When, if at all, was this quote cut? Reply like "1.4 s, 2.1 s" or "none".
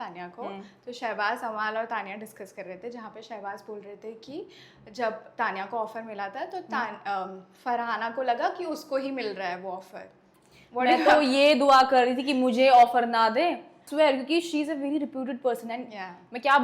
13.8 s